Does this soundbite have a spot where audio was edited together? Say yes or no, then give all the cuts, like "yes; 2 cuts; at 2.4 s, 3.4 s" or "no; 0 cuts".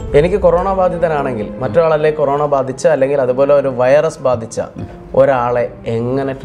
no; 0 cuts